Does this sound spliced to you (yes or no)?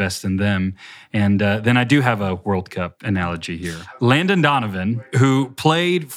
yes